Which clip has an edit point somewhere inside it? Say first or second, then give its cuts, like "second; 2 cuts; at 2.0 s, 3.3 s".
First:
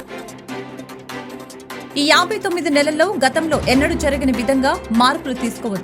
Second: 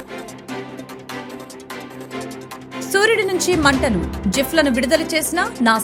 first; 1 cut; at 1.9 s